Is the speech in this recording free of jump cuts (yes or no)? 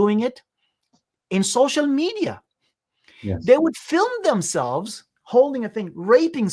yes